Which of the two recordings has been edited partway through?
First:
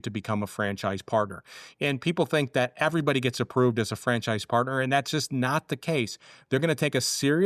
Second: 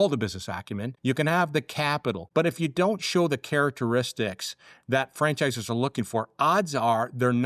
second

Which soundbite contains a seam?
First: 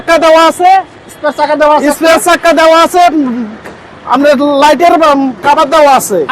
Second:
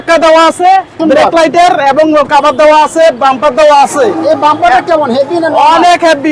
second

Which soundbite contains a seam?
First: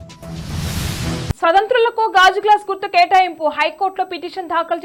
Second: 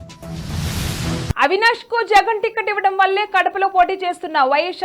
second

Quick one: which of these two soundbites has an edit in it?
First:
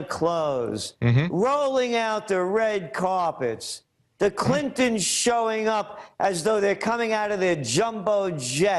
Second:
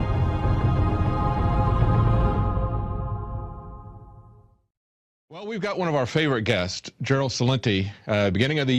first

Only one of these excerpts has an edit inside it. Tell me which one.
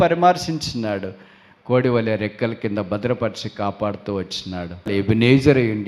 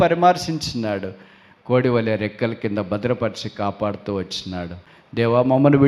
second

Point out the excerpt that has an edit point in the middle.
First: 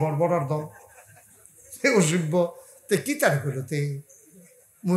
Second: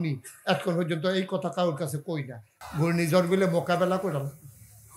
second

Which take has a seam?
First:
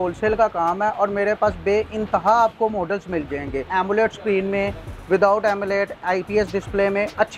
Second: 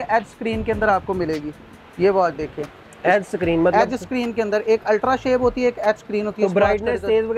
first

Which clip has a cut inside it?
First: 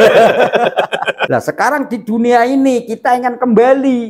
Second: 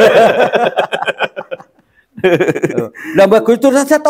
first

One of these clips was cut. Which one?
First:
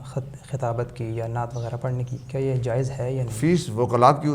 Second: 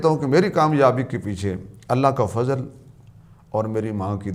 first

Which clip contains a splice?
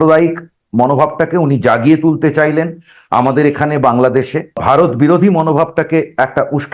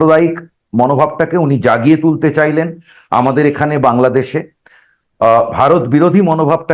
first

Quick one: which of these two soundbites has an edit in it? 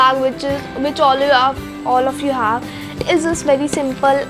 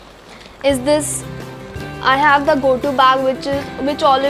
first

